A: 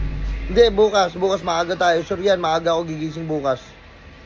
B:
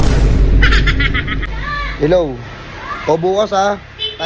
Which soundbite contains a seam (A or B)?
B